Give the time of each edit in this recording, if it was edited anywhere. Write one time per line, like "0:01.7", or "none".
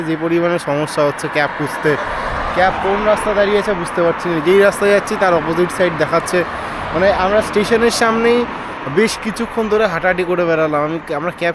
none